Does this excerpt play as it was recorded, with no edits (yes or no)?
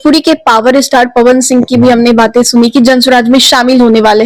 yes